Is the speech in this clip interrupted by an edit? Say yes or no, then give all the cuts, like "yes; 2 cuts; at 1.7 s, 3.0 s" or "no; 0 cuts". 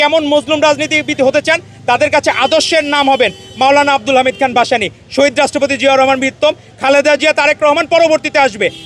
no; 0 cuts